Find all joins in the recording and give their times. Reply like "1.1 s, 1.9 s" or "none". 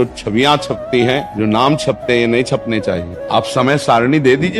1.3 s, 3.1 s